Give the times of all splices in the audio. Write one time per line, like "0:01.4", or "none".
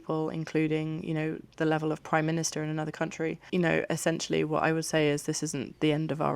0:03.4